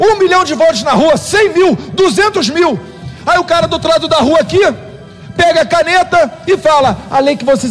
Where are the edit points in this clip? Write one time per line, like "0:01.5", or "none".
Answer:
none

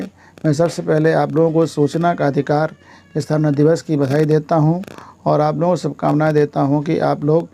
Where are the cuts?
none

